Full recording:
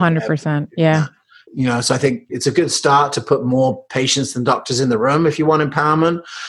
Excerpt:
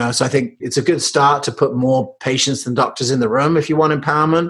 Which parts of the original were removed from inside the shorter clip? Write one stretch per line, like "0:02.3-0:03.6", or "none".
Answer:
none